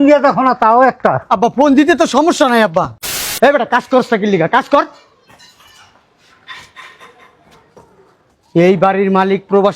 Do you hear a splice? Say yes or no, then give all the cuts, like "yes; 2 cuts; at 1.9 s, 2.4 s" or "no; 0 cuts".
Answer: yes; 1 cut; at 3.2 s